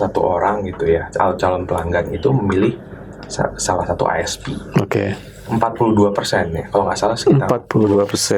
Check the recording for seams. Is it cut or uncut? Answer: uncut